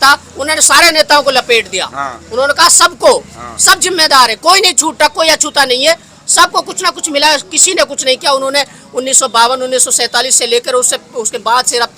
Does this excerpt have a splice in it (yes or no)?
no